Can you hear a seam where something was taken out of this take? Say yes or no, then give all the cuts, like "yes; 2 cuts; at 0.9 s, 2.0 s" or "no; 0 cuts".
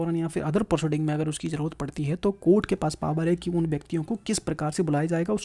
no; 0 cuts